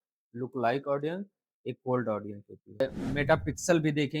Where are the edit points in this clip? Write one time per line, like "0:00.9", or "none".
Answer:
0:02.8